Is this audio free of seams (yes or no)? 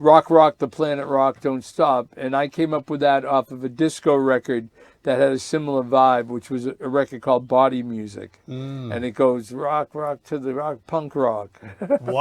yes